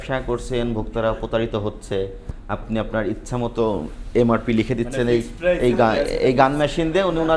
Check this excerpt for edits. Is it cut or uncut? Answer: uncut